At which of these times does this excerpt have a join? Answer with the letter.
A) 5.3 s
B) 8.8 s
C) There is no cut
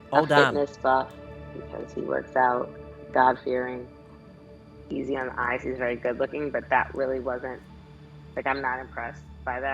B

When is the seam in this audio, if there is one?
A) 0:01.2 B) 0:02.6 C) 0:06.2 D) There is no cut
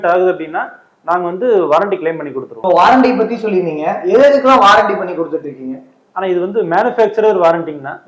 D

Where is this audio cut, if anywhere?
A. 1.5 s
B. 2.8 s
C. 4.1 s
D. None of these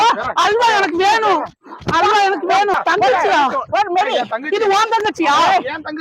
B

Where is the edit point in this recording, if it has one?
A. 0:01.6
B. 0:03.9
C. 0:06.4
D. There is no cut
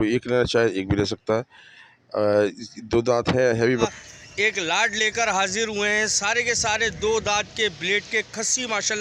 B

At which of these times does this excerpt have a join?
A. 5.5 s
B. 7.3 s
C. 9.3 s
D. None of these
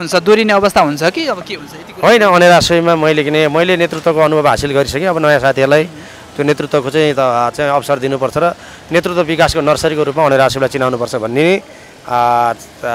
D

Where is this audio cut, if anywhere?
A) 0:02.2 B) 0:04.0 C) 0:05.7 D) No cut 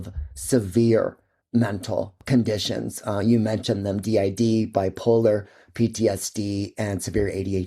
A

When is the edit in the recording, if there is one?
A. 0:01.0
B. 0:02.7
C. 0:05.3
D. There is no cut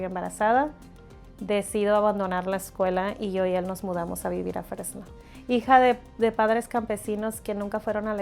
C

